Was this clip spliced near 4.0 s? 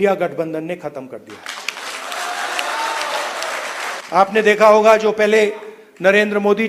yes; 1 cut; at 4.0 s

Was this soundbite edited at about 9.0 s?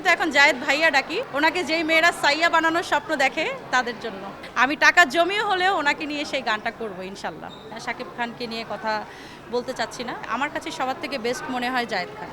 no; 4 cuts; at 1.3 s, 4.4 s, 7.7 s, 10.3 s

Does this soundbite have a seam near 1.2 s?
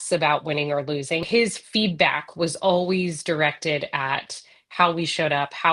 yes; 1 cut; at 1.2 s

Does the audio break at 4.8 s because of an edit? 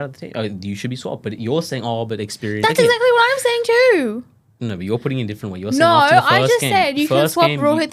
no; 0 cuts

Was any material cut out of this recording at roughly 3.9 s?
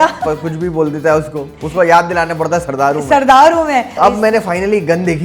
yes; 1 cut; at 3.9 s

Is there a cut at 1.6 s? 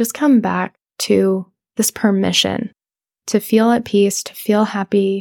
yes; 1 cut; at 1.6 s

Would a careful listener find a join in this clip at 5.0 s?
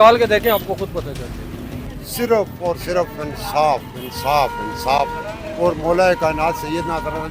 no; 1 cut; at 1.9 s

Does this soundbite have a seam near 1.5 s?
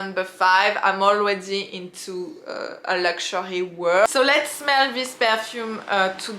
no; 1 cut; at 4.1 s

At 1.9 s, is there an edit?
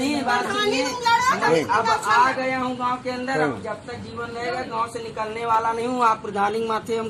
no; 0 cuts

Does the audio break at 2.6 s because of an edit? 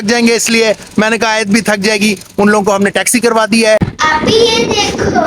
no; 1 cut; at 3.9 s

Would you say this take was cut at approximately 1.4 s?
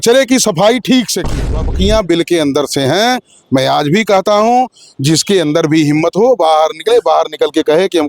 yes; 1 cut; at 1.4 s

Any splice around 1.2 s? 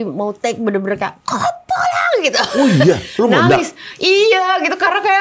no; 0 cuts

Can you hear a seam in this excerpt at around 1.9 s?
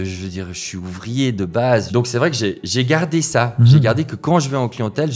yes; 1 cut; at 1.9 s

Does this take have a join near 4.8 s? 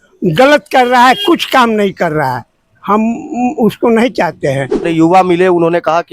yes; 1 cut; at 4.8 s

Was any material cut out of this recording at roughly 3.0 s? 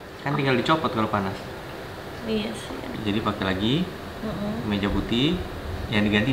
yes; 1 cut; at 3.0 s

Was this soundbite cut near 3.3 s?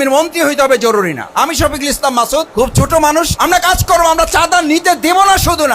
yes; 2 cuts; at 2.5 s, 3.3 s

